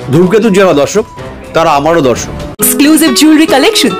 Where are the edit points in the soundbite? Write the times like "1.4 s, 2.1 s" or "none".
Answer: 2.5 s